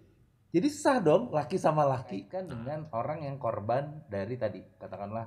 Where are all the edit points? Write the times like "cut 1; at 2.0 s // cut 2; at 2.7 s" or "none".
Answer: cut 1; at 2.3 s